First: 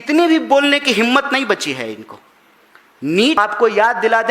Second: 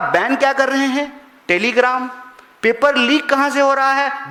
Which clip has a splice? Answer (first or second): first